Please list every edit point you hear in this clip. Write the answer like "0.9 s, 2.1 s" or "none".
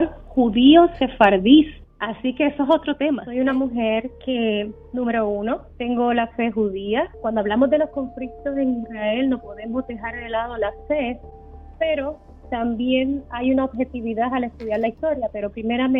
3.2 s, 5.7 s, 7.2 s